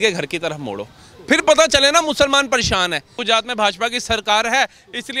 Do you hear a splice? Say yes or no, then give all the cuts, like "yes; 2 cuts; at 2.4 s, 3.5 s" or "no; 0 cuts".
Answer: yes; 1 cut; at 3.2 s